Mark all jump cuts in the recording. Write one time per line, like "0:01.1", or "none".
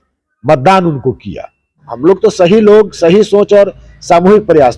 0:01.8